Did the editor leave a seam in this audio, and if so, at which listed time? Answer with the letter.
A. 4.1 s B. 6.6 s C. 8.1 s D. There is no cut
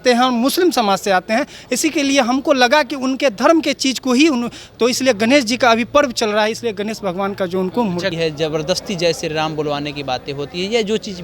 C